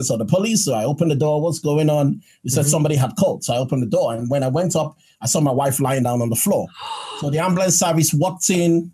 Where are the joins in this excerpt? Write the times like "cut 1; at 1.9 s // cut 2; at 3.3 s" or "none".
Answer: none